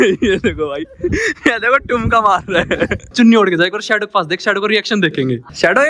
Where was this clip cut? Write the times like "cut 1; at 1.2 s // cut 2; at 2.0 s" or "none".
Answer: cut 1; at 3.1 s